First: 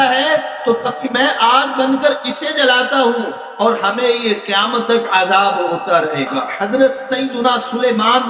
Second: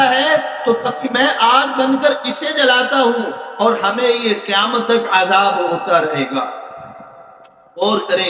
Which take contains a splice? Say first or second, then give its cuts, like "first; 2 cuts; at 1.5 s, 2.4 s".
first; 1 cut; at 6.5 s